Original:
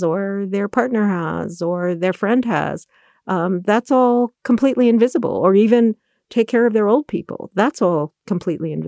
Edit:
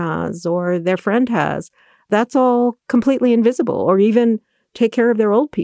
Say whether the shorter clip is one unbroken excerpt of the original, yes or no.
no